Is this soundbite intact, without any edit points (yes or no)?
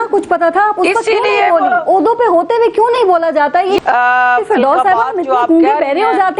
no